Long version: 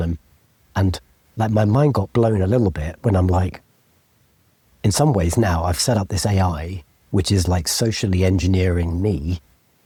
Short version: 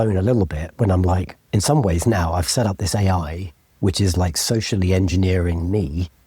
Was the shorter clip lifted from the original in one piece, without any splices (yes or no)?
no